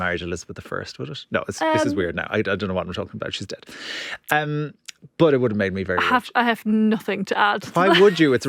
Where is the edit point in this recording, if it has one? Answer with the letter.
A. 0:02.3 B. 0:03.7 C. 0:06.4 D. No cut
D